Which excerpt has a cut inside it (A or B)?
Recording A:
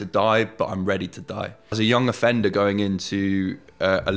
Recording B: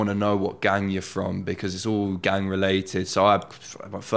A